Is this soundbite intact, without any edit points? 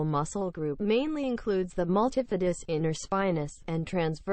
yes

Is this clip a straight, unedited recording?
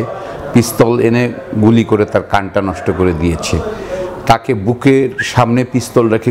yes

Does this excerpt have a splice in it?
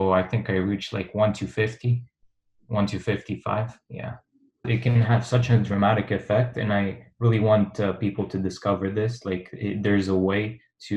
yes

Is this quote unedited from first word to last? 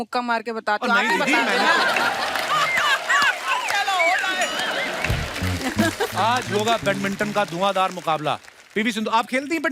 no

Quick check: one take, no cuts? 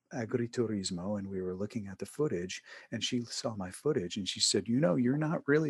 yes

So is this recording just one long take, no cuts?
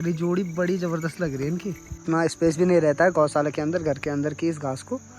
no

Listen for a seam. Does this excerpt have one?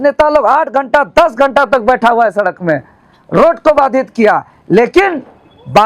no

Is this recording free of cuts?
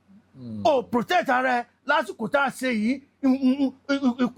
yes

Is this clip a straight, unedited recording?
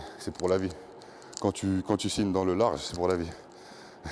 no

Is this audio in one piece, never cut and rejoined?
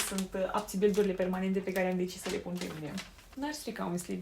no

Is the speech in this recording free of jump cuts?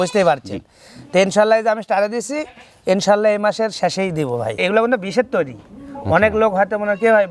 no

